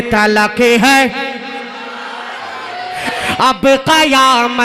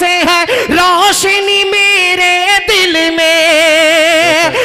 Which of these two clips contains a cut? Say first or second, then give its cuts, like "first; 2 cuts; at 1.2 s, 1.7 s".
first; 1 cut; at 3.1 s